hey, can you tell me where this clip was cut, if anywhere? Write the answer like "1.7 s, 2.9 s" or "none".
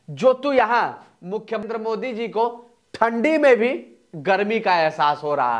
1.6 s